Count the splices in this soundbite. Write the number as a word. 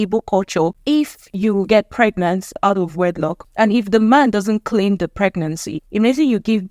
four